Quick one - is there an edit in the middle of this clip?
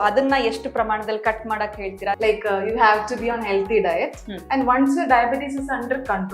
yes; 1 cut; at 2.2 s

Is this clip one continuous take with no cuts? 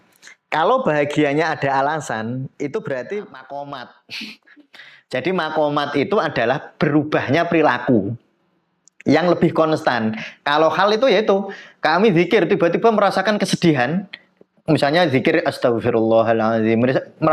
no; 1 cut; at 3.4 s

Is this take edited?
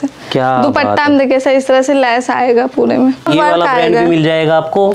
yes; 1 cut; at 3.3 s

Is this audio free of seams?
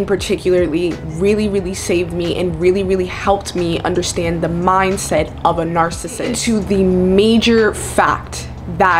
no; 1 cut; at 6.4 s

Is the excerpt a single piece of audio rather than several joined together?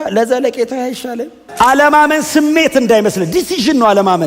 no; 1 cut; at 1.4 s

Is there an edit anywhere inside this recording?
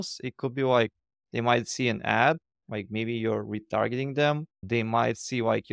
no; 0 cuts

